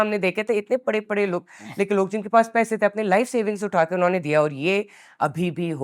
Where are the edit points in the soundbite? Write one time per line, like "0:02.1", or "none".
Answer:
none